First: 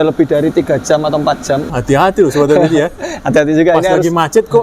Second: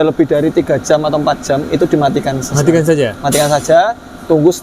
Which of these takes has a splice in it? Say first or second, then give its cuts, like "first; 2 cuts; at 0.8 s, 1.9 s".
first; 1 cut; at 1.7 s